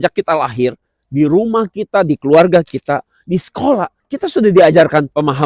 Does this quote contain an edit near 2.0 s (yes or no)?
no